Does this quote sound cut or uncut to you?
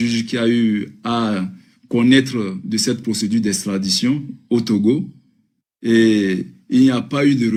uncut